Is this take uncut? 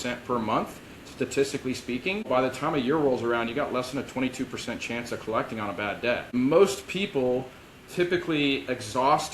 no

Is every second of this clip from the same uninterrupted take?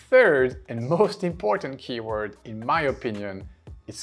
yes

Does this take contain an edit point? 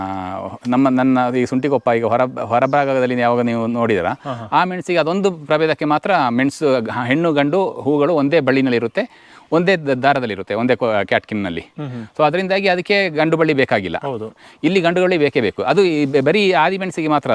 no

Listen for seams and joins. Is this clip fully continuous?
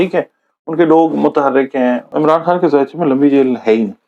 no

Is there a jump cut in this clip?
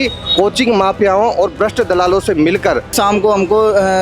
yes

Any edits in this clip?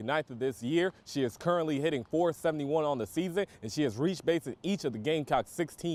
no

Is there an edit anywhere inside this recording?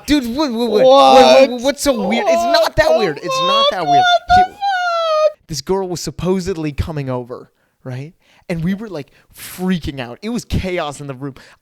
yes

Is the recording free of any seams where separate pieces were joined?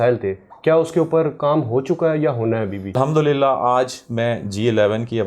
no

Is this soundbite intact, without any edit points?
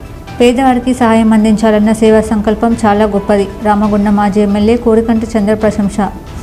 yes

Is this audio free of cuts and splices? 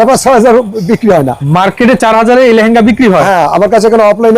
no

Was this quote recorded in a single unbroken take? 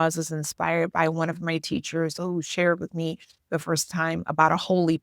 no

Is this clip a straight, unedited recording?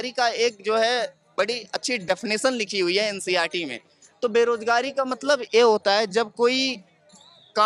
yes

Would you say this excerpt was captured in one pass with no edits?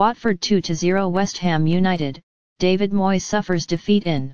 no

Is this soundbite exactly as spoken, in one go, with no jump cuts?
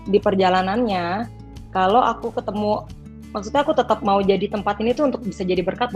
yes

